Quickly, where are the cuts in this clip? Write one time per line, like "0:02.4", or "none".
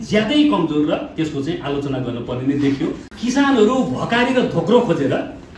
0:03.1